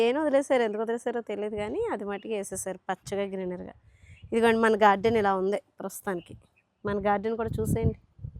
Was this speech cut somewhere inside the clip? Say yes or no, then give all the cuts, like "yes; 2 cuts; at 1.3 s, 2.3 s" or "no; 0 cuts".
no; 0 cuts